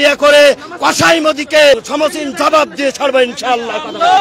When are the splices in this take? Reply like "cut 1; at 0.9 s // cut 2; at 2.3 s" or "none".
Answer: cut 1; at 1.8 s